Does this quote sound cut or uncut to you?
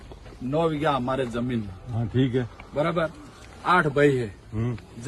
uncut